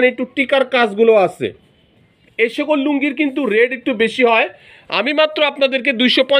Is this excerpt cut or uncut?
uncut